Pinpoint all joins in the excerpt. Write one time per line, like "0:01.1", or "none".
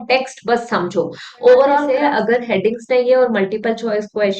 0:01.9

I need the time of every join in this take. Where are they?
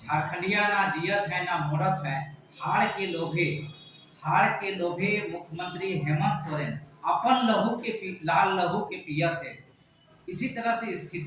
none

